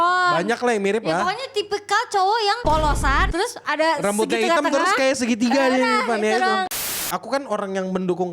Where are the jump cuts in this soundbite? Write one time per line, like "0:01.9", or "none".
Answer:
0:03.2
0:06.8